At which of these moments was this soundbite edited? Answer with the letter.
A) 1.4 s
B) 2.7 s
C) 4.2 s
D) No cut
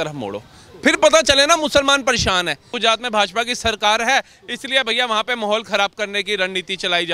B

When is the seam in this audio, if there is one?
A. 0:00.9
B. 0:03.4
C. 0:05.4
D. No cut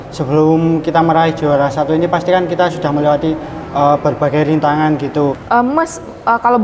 C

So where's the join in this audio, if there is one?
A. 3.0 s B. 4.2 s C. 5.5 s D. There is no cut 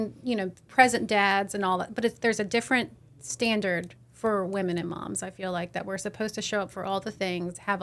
D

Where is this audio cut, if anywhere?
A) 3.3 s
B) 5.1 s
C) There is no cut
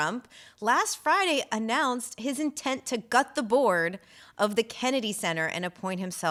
C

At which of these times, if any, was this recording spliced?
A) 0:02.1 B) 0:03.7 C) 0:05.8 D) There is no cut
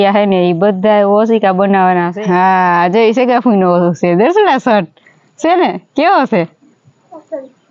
A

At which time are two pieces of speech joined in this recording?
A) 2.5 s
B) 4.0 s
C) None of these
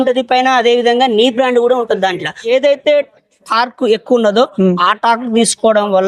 A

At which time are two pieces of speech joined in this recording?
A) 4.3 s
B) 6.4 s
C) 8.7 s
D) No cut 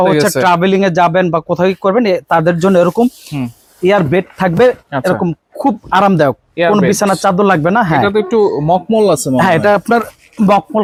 D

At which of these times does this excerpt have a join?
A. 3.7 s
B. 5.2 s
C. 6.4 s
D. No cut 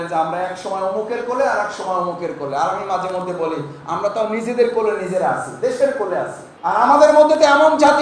C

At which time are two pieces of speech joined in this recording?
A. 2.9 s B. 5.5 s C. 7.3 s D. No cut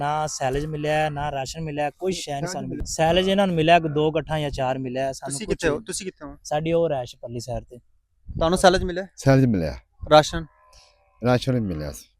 A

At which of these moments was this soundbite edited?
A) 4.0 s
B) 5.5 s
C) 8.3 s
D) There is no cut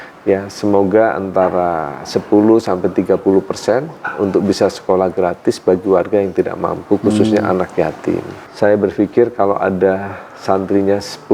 C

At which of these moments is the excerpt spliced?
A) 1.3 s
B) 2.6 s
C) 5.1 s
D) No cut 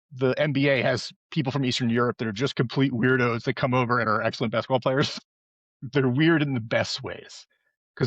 C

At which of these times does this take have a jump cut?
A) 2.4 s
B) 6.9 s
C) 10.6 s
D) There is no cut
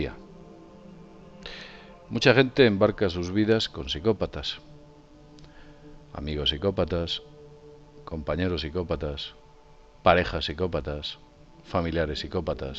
C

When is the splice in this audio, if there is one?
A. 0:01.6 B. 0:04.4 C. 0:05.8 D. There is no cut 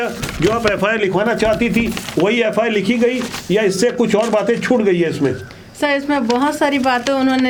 D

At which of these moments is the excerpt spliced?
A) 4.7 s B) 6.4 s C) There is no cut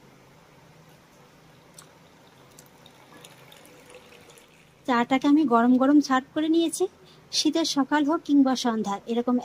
A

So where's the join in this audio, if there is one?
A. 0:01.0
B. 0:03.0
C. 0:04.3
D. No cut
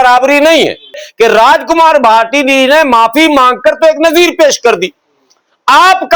A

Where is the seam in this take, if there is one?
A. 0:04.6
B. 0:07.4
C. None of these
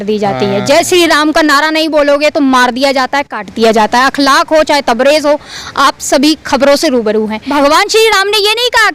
B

